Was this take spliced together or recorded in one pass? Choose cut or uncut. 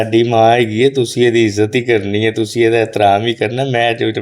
uncut